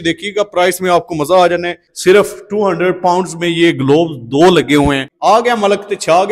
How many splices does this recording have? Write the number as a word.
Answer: two